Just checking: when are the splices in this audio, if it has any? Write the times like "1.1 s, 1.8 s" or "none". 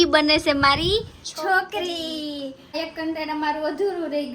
2.7 s